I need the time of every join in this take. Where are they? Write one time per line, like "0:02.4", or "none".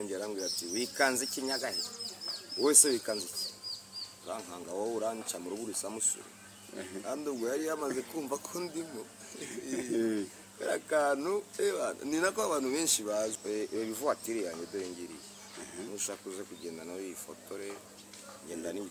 0:13.4